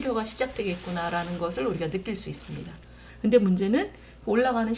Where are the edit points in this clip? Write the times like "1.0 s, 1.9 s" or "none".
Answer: 3.0 s